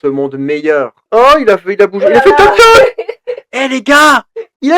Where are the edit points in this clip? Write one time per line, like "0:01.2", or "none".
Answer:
0:01.0